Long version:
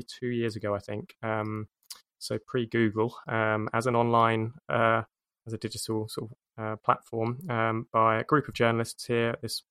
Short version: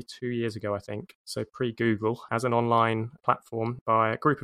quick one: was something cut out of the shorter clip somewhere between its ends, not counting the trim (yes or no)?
yes